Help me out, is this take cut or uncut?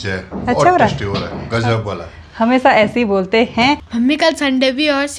cut